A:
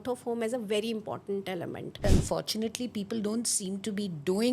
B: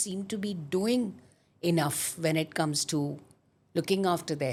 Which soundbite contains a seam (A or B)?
A